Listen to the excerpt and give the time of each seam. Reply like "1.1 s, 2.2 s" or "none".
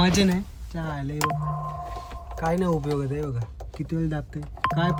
none